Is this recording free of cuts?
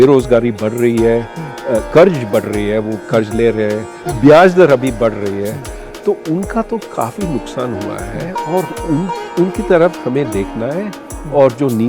yes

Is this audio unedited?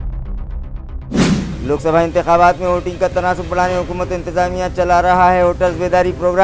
yes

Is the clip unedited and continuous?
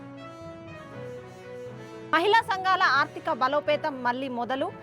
no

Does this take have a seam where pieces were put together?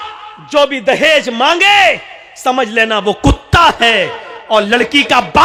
no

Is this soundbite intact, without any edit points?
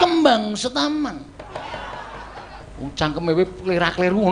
no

